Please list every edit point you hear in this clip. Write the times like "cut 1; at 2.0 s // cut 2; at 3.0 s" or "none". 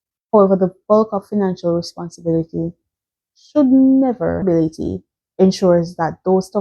cut 1; at 4.4 s